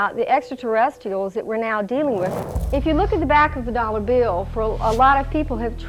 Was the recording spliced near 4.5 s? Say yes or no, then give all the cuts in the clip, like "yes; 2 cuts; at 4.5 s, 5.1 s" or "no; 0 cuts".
no; 1 cut; at 2.4 s